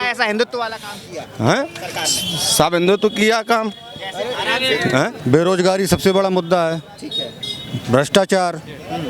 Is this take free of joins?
no; 1 cut; at 5.2 s

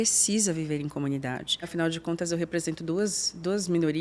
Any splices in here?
yes; 1 cut; at 1.7 s

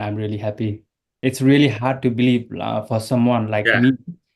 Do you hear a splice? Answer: yes; 1 cut; at 1.0 s

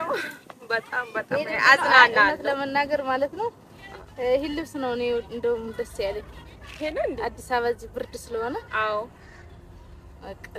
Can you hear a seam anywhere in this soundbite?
no; 0 cuts

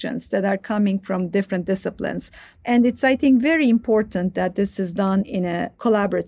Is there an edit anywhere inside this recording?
yes; 2 cuts; at 2.4 s, 5.3 s

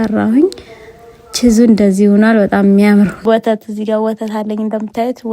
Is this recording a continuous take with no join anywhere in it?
no; 1 cut; at 3.2 s

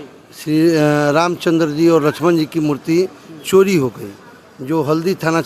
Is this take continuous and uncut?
yes; 0 cuts

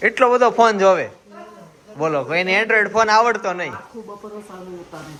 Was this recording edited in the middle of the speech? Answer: no; 0 cuts

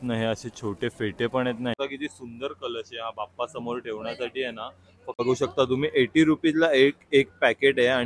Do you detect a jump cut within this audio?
yes; 2 cuts; at 1.8 s, 5.2 s

